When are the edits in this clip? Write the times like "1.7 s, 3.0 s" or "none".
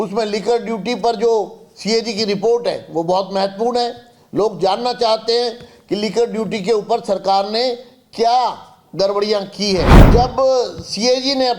10.0 s

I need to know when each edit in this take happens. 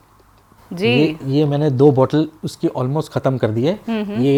none

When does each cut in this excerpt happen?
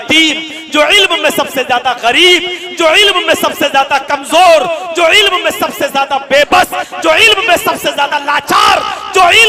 none

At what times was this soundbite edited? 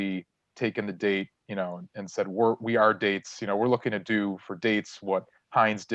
none

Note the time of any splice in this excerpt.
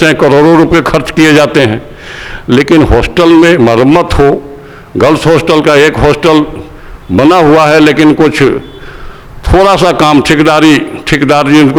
none

